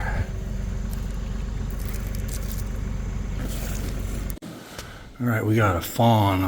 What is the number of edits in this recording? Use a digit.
1